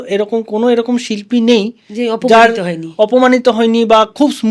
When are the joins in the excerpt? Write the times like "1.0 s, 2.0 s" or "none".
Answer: none